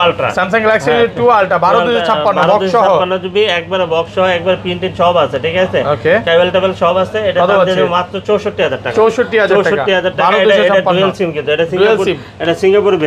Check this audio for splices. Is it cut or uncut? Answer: uncut